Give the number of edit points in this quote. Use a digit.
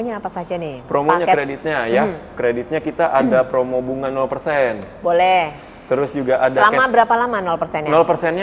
0